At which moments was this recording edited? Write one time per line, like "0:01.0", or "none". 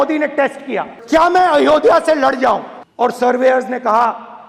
0:00.9
0:02.8

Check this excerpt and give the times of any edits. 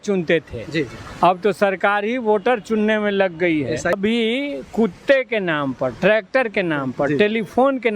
0:03.9

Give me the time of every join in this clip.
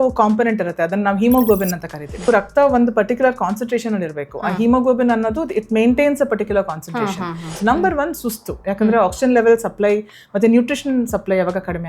0:02.3
0:07.4

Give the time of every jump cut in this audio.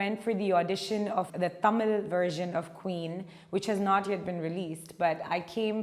none

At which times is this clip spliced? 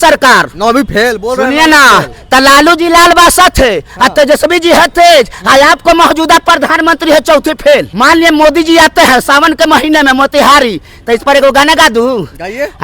0:07.9

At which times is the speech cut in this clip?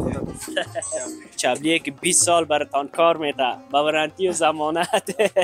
0:01.4

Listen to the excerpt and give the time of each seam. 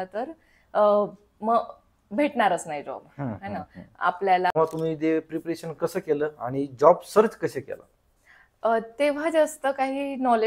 0:04.5

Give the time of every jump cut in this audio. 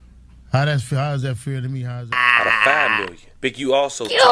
0:02.1

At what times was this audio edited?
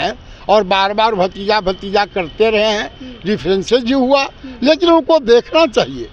none

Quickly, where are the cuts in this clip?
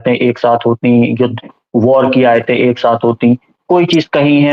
none

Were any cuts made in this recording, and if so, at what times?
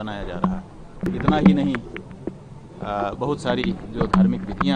0:01.1

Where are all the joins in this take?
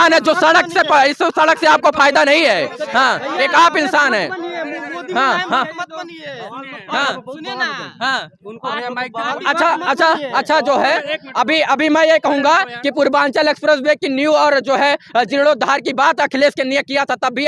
none

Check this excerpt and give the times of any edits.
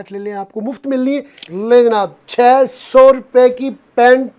0:01.4

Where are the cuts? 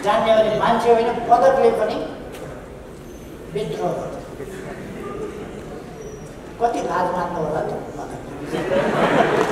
none

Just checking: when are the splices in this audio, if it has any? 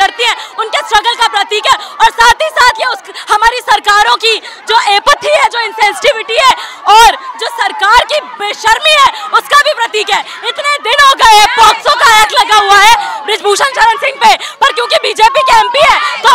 none

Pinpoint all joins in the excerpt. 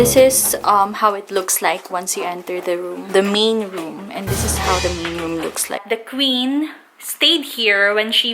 0:03.0
0:05.8

